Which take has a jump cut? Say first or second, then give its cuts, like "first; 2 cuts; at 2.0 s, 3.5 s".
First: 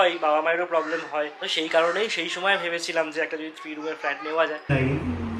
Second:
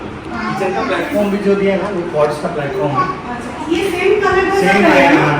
first; 2 cuts; at 1.4 s, 4.7 s